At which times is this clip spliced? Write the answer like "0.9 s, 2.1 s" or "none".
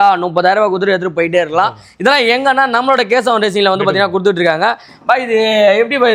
none